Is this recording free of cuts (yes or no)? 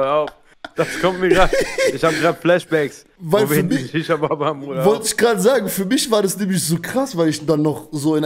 yes